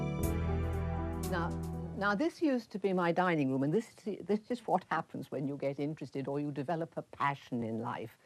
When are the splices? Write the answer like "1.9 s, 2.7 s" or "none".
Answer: none